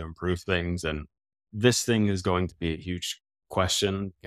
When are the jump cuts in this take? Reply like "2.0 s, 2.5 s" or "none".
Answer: none